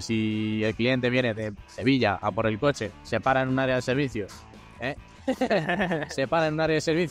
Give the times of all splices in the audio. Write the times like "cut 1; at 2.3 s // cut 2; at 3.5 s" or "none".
cut 1; at 2.9 s